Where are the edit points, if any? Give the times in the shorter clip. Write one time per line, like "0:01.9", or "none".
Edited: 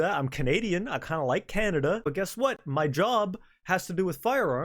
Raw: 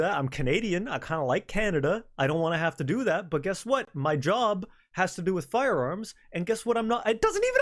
0:02.1